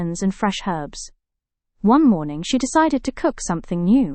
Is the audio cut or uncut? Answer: uncut